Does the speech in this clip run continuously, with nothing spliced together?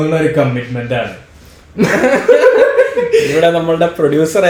yes; 0 cuts

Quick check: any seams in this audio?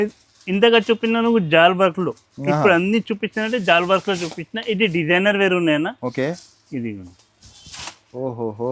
no; 0 cuts

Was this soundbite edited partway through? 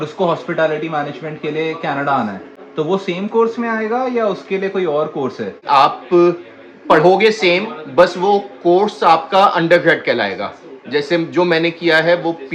no; 0 cuts

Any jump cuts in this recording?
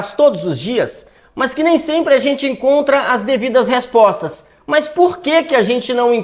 no; 0 cuts

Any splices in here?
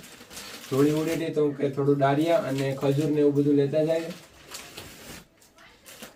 no; 0 cuts

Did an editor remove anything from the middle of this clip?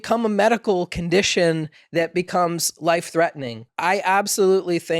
yes; 1 cut; at 3.7 s

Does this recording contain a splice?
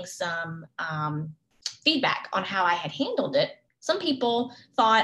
yes; 1 cut; at 3.7 s

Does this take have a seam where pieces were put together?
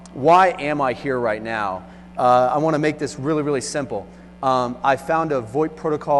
no; 0 cuts

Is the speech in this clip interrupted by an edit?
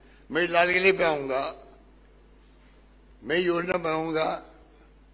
no; 0 cuts

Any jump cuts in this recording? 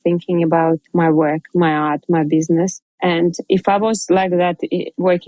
yes; 1 cut; at 2.8 s

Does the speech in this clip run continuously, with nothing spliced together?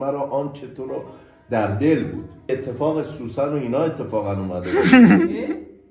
no; 1 cut; at 2.5 s

